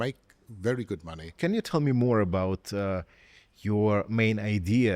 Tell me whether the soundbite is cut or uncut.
uncut